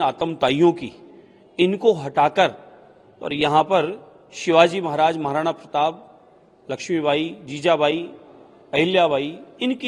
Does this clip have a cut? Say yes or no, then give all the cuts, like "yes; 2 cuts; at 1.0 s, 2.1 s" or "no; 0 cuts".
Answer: no; 0 cuts